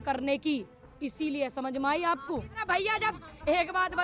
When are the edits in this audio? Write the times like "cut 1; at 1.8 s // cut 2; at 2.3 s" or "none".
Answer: cut 1; at 2.5 s